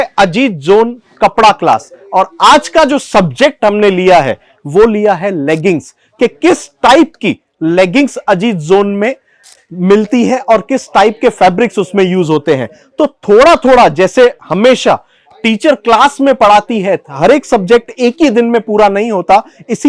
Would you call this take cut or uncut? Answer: uncut